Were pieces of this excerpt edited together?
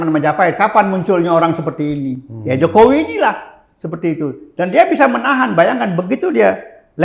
no; 0 cuts

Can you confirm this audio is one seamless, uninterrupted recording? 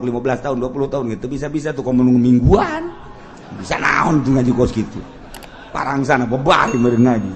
yes; 0 cuts

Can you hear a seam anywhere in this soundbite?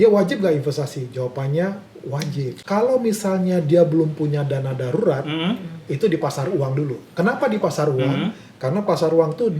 yes; 1 cut; at 2.6 s

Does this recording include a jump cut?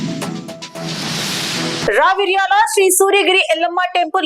no; 0 cuts

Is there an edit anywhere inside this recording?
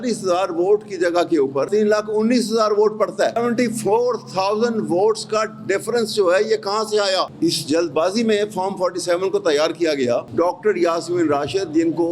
yes; 4 cuts; at 1.7 s, 3.4 s, 7.3 s, 10.3 s

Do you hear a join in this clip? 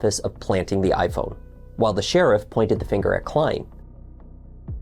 no; 0 cuts

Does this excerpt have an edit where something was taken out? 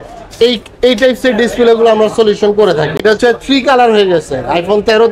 yes; 1 cut; at 3.0 s

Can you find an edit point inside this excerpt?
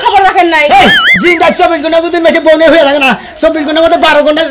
no; 0 cuts

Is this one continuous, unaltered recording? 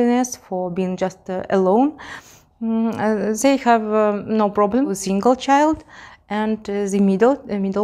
no; 1 cut; at 4.9 s

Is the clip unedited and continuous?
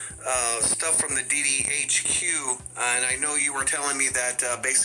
yes; 0 cuts

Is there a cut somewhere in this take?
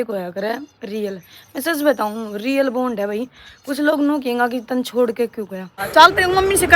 yes; 1 cut; at 5.8 s

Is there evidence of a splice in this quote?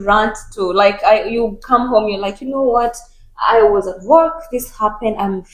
no; 0 cuts

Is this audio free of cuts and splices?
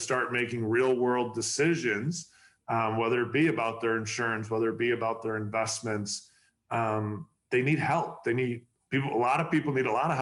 yes; 0 cuts

